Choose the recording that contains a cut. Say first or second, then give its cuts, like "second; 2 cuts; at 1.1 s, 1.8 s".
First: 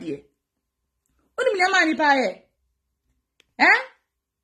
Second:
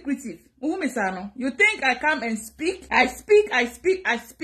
second; 1 cut; at 2.8 s